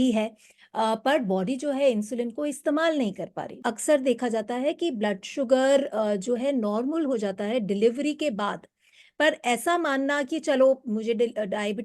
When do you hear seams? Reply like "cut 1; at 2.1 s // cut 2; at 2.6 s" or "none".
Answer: cut 1; at 3.5 s